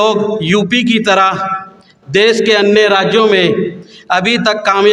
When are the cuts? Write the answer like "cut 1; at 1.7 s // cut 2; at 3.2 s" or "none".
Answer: none